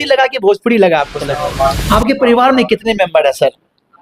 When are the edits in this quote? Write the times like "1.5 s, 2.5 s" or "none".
1.4 s